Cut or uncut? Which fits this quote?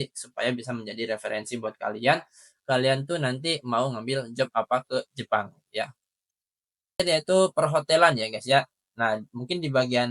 cut